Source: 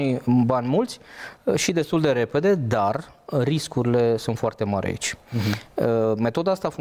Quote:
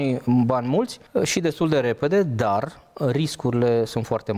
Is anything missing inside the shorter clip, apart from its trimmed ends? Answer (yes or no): yes